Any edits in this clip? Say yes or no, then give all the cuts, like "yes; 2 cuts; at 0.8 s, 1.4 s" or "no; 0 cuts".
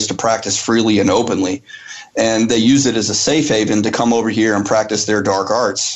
no; 0 cuts